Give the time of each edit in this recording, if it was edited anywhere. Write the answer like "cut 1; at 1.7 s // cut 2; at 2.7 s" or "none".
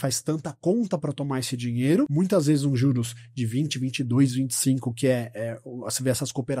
cut 1; at 2.1 s